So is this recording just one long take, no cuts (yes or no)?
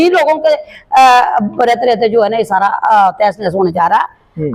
yes